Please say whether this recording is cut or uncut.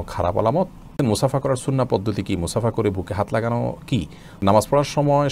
cut